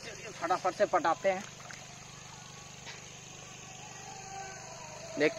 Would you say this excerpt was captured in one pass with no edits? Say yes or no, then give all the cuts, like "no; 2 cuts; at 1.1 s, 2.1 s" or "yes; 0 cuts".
yes; 0 cuts